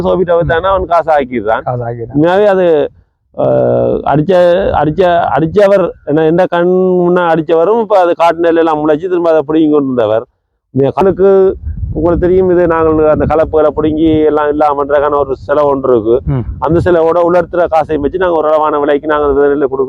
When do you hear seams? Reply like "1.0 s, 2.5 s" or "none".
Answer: 11.0 s, 18.3 s